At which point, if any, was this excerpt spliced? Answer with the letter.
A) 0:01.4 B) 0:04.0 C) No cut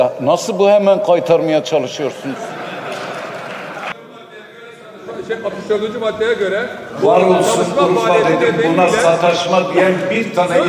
B